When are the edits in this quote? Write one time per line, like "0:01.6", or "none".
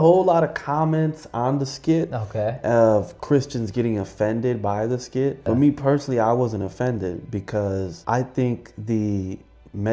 0:05.4
0:08.0

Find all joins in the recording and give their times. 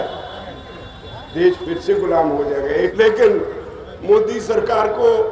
0:02.9

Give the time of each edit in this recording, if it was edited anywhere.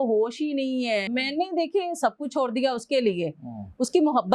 0:01.1

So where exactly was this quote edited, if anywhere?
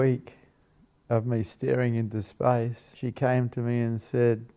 0:02.8

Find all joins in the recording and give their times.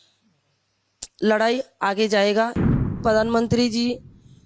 0:03.0

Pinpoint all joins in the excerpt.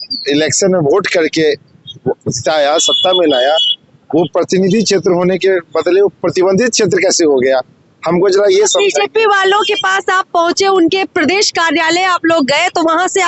none

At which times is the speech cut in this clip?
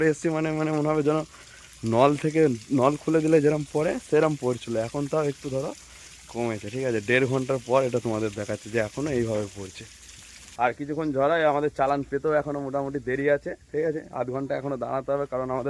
none

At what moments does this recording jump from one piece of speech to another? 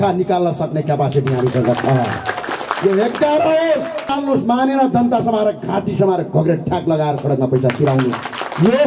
0:04.1

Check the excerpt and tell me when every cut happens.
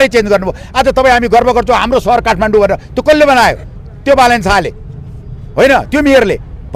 none

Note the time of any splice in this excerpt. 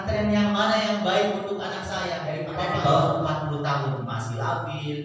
0:02.5

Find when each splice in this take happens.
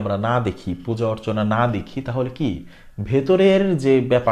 none

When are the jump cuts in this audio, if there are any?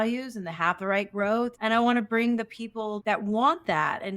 0:01.5
0:03.0

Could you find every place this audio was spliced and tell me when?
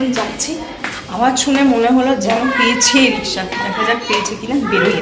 none

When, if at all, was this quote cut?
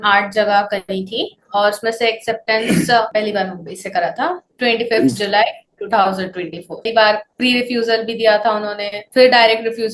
0:03.1
0:06.9

